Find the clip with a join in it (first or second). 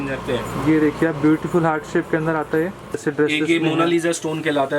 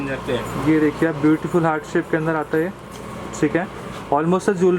first